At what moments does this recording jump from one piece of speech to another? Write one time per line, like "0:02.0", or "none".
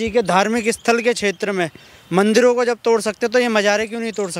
none